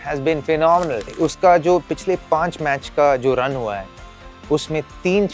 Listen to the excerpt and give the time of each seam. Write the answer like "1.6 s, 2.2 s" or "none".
1.0 s

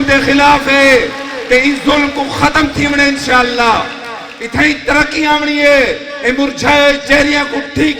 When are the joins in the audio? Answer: none

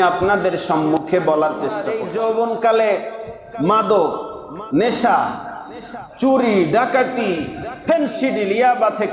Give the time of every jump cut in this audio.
2.0 s

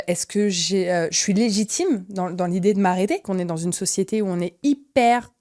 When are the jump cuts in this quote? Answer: 3.3 s

